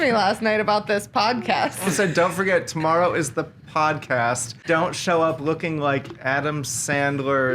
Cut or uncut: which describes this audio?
cut